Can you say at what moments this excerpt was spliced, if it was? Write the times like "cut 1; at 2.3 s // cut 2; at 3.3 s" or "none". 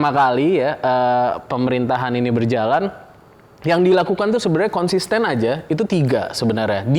none

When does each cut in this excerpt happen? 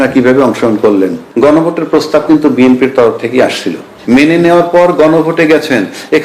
cut 1; at 1.2 s // cut 2; at 3.9 s

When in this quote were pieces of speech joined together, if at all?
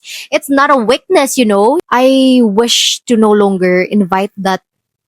cut 1; at 1.8 s

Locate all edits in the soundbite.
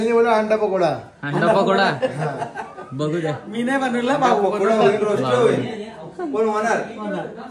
none

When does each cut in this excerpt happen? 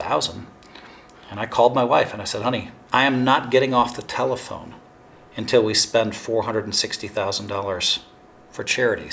cut 1; at 2.7 s

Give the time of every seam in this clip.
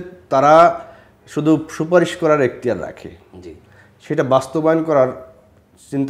none

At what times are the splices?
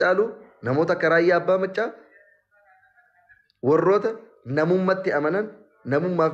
none

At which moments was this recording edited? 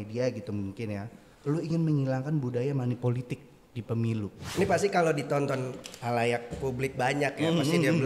cut 1; at 4.4 s

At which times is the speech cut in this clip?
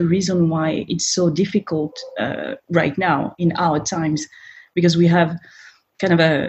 none

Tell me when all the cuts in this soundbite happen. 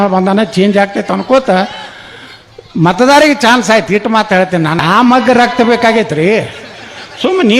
cut 1; at 4.8 s

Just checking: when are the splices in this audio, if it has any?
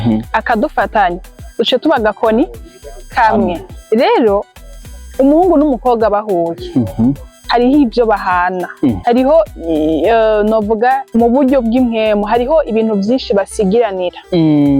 cut 1; at 3.7 s // cut 2; at 7.3 s // cut 3; at 9.0 s // cut 4; at 11.0 s

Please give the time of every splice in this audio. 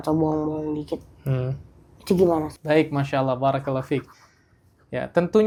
none

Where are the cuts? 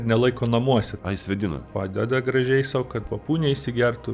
cut 1; at 1.3 s // cut 2; at 3.1 s

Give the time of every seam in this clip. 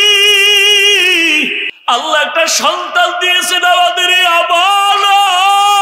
cut 1; at 1.7 s

